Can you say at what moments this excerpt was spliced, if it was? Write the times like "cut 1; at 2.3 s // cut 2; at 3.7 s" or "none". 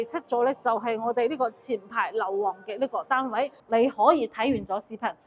cut 1; at 3.6 s